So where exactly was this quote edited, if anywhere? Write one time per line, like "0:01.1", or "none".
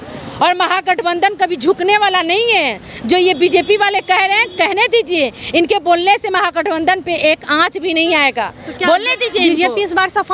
none

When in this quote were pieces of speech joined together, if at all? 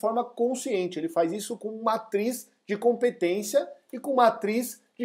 none

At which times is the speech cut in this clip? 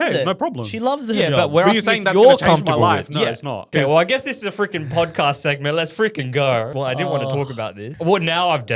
0:03.7
0:06.7
0:07.9

